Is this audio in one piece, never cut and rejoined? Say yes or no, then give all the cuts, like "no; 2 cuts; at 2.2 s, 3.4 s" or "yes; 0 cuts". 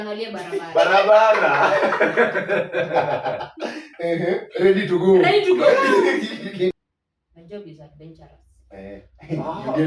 no; 1 cut; at 6.8 s